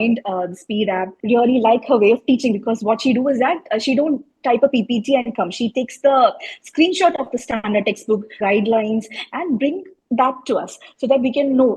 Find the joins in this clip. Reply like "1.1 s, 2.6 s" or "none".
1.1 s, 8.3 s